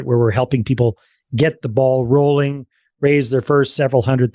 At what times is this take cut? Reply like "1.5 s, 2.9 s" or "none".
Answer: none